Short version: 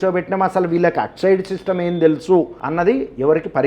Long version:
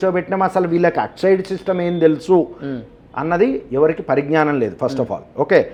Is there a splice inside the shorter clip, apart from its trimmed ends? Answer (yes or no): yes